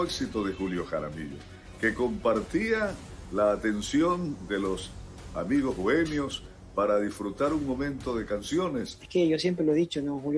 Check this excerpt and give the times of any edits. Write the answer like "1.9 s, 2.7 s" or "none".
9.0 s